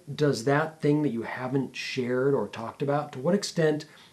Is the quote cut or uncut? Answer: uncut